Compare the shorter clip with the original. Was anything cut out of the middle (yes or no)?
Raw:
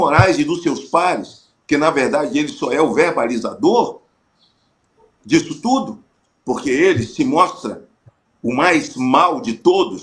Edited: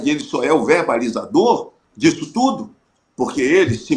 yes